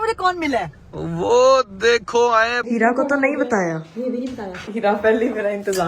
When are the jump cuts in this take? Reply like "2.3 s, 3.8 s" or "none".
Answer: 2.6 s, 4.6 s